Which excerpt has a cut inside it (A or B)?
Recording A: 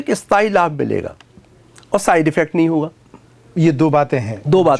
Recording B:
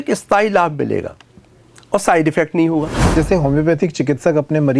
B